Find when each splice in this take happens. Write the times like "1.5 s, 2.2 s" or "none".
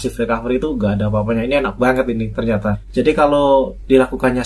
2.8 s